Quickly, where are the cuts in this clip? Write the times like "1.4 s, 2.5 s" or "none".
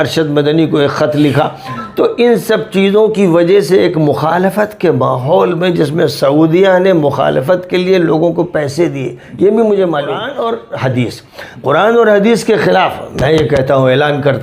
10.3 s